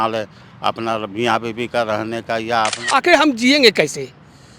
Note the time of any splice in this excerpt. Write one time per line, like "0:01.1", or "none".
0:02.8